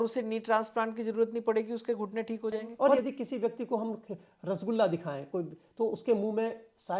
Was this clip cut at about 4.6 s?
no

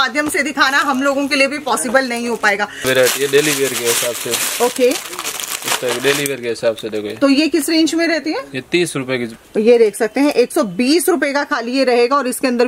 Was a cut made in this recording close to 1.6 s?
no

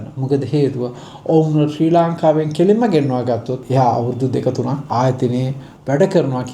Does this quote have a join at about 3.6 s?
yes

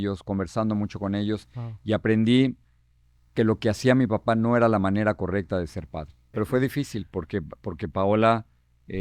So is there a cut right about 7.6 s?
no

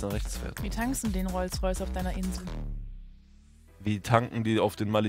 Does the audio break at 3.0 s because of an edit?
no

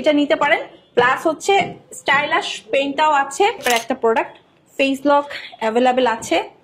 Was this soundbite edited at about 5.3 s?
no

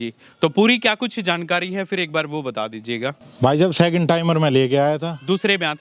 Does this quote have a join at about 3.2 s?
yes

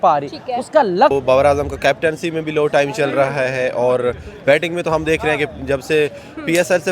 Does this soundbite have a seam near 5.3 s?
no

